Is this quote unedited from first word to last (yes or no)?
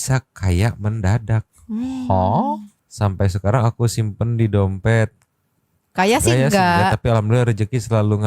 no